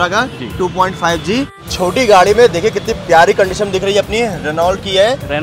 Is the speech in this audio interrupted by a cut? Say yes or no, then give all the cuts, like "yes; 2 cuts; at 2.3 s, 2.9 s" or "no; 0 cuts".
yes; 1 cut; at 1.6 s